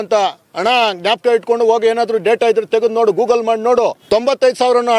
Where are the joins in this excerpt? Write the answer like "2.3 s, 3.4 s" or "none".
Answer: 4.0 s